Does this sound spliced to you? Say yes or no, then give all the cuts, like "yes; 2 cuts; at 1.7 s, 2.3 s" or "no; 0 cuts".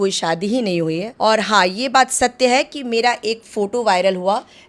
yes; 1 cut; at 1.1 s